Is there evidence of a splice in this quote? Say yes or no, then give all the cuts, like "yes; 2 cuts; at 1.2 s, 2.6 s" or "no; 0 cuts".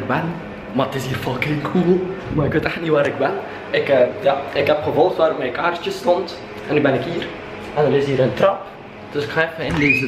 no; 0 cuts